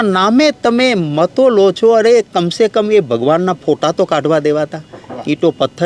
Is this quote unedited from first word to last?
yes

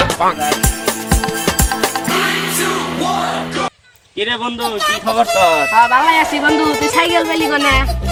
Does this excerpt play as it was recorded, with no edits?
yes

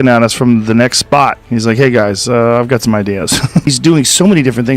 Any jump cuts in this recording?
yes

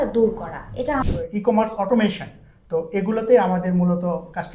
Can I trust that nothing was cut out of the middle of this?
no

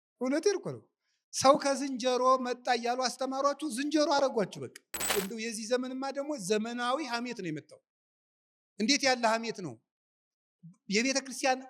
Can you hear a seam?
yes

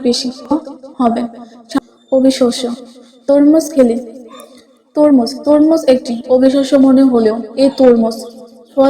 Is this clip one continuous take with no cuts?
no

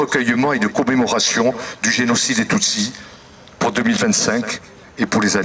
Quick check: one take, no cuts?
yes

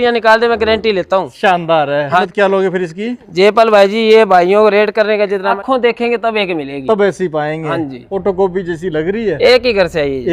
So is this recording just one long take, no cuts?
no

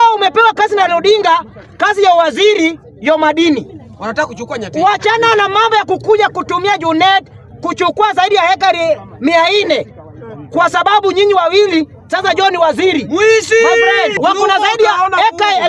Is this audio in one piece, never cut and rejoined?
no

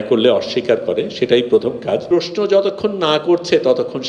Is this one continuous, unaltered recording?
no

